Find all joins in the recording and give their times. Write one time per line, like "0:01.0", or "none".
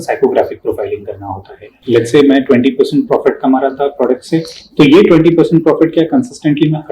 0:01.8